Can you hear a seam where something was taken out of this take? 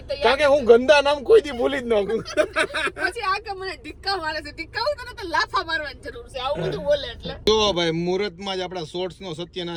no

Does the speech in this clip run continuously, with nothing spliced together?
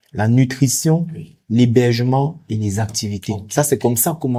yes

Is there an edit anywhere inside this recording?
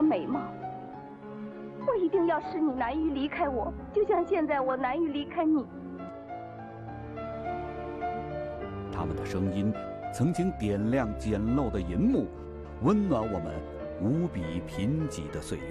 no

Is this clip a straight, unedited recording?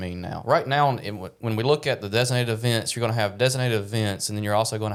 yes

